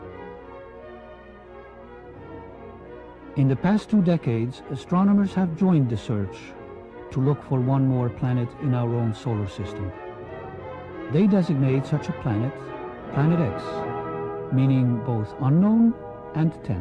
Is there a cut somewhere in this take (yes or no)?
no